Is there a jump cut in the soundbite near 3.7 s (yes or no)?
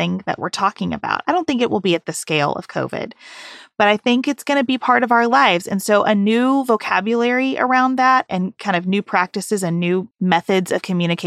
no